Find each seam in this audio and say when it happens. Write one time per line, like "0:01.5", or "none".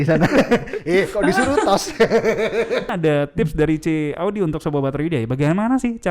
0:02.9